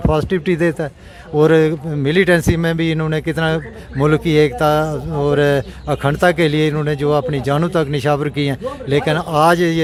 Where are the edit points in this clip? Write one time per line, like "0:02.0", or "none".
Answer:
none